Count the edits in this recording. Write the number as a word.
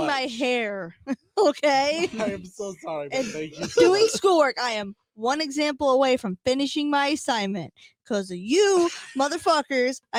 zero